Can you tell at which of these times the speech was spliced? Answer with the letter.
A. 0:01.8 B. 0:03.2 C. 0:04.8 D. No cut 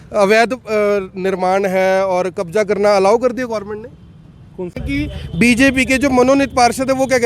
C